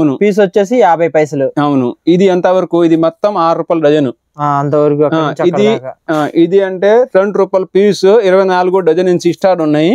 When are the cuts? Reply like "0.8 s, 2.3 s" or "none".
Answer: none